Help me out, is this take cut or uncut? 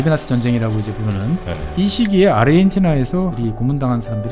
cut